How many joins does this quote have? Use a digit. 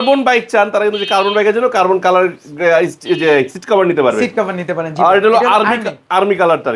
0